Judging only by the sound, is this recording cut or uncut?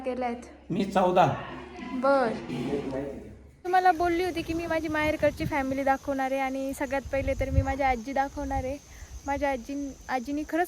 cut